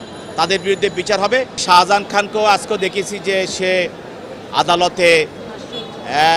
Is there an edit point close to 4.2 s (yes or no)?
no